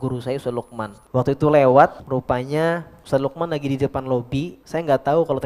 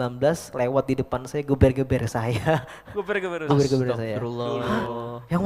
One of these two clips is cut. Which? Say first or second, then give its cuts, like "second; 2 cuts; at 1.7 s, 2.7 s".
first; 4 cuts; at 1.0 s, 2.0 s, 2.9 s, 4.6 s